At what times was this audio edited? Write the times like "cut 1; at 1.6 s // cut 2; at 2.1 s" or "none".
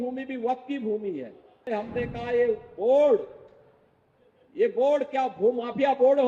cut 1; at 1.7 s